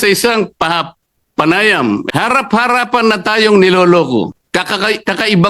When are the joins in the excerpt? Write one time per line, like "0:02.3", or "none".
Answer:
0:02.1
0:04.4